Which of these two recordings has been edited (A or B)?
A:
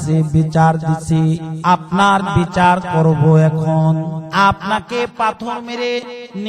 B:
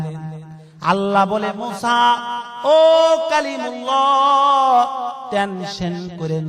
A